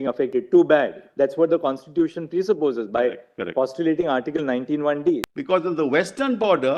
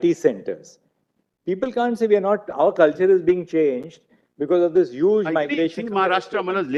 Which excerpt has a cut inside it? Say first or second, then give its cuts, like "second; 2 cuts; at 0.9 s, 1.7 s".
first; 1 cut; at 5.3 s